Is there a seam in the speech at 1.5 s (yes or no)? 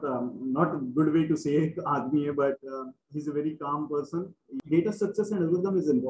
no